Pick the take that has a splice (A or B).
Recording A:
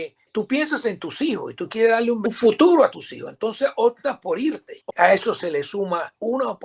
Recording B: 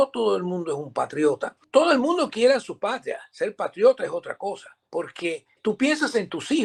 A